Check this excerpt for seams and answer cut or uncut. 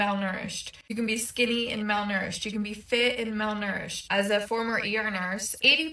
cut